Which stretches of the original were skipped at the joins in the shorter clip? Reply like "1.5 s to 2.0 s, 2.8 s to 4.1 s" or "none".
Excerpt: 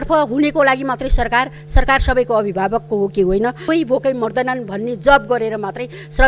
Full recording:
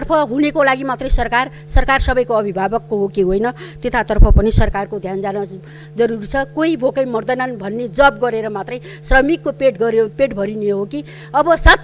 3.6 s to 6.5 s

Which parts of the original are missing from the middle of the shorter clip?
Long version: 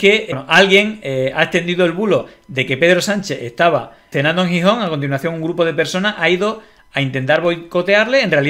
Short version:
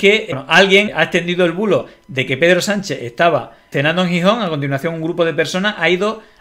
0.9 s to 1.3 s

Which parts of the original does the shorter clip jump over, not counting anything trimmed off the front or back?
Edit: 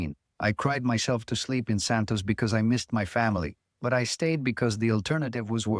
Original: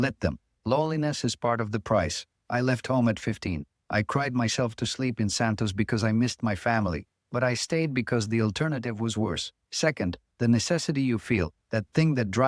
none

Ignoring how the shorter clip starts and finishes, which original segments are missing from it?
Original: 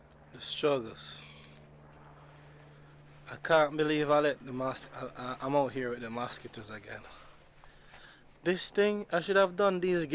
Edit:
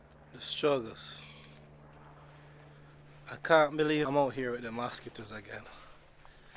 4.1 s to 5.4 s

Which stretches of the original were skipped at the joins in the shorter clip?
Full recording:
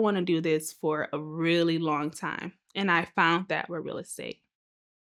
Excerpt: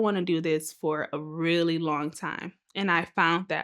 none

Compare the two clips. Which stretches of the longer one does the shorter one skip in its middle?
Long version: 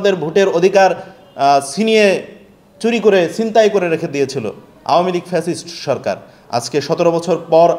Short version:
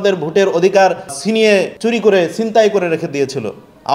1.3 s to 2.3 s

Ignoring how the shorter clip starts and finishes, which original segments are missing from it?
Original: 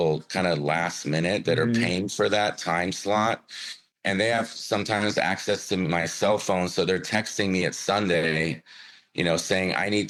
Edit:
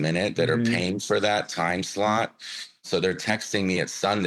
3.9 s to 6.7 s

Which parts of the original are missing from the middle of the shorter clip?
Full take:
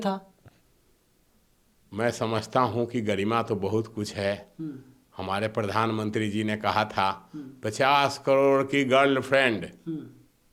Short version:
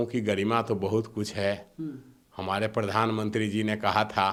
none

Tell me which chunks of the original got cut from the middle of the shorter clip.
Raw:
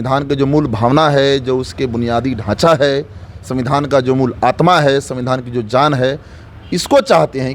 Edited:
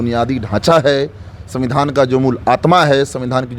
none

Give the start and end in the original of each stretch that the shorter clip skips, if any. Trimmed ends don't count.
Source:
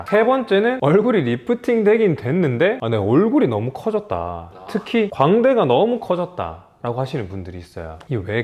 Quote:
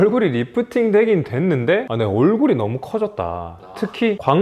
none

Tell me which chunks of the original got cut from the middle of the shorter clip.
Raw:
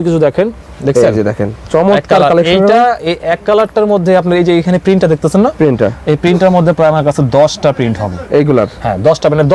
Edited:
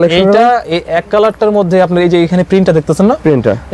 none

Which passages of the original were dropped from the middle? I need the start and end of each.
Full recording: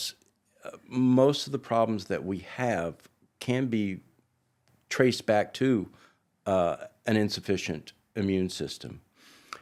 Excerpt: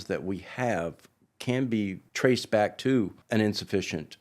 4.1 s to 4.8 s, 5.9 s to 6.9 s

